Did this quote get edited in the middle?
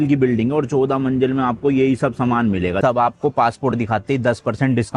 yes; 1 cut; at 2.8 s

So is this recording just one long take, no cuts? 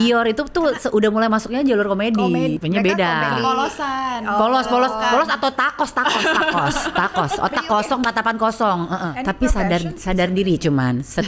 no; 2 cuts; at 2.6 s, 9.1 s

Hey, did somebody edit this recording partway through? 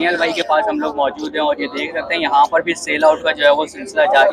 no; 0 cuts

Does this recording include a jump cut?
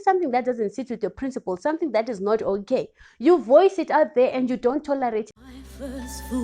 yes; 1 cut; at 5.3 s

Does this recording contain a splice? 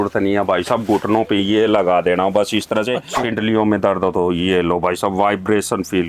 yes; 1 cut; at 3.1 s

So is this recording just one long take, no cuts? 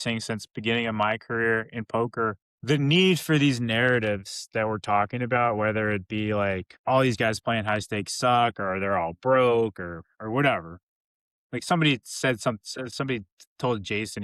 no; 2 cuts; at 2.5 s, 6.7 s

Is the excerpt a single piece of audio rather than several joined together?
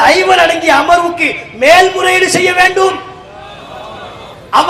yes; 0 cuts

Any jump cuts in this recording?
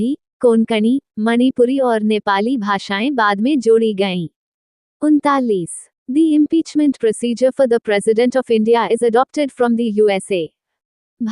no; 0 cuts

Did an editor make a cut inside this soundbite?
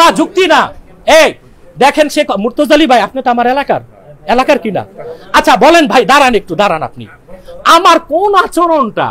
no; 0 cuts

